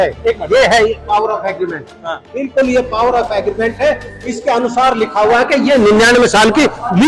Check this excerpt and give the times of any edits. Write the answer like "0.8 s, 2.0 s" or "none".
none